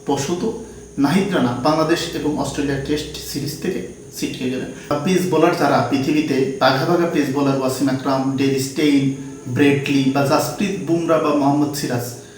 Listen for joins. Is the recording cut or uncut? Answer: cut